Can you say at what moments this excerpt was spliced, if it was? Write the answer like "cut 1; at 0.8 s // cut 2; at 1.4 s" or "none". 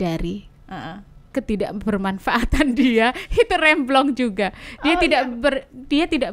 none